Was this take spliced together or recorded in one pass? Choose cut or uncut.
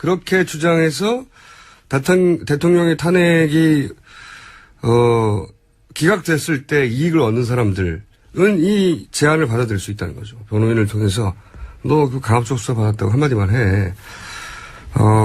uncut